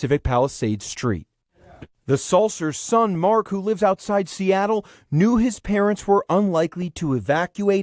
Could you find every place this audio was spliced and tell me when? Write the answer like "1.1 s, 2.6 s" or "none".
1.7 s